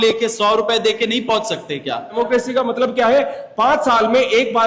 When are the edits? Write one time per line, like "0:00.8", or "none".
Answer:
0:02.2